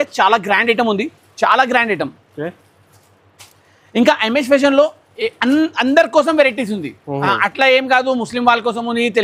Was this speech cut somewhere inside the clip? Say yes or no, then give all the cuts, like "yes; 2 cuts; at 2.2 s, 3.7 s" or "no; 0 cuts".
no; 0 cuts